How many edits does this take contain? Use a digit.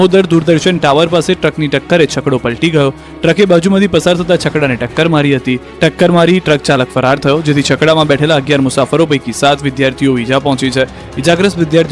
1